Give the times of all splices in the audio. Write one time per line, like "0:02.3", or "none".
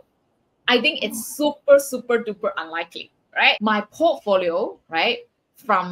0:03.6